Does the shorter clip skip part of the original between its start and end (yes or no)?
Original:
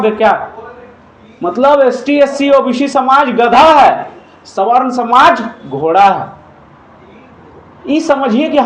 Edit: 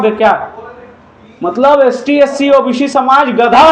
no